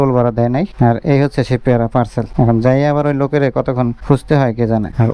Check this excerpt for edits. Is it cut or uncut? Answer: uncut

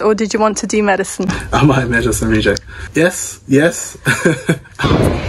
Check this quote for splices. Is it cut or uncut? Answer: uncut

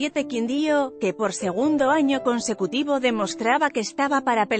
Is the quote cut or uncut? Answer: uncut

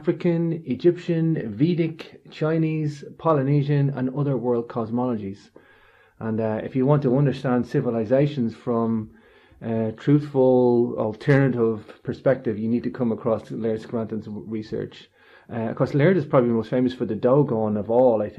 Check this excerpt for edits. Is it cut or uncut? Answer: cut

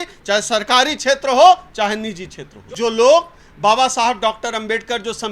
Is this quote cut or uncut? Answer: cut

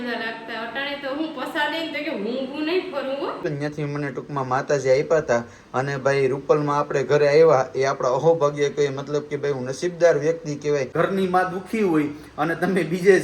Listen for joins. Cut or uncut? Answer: cut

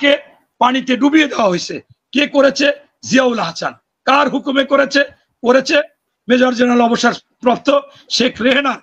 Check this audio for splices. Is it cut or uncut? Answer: uncut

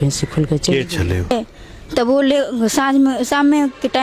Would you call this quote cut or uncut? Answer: cut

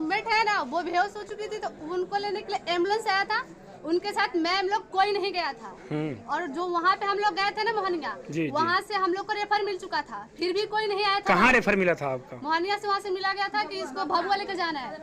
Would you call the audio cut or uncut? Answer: uncut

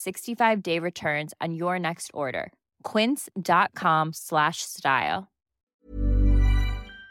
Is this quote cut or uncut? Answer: cut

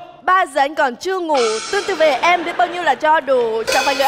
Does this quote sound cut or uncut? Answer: uncut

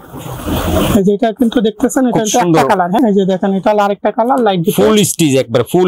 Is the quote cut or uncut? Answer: cut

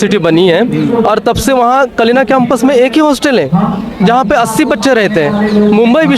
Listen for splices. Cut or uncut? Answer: uncut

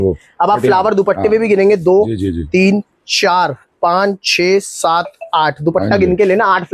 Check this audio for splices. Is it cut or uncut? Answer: uncut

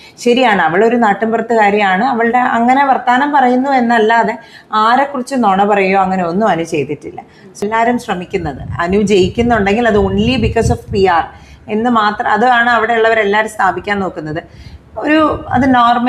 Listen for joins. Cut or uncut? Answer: cut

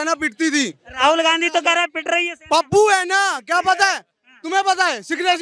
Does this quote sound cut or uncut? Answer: uncut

